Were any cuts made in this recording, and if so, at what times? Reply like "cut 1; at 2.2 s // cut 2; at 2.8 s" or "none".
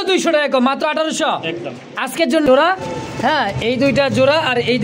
cut 1; at 2.5 s